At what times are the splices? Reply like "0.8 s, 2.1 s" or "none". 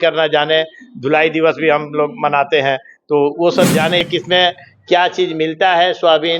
4.1 s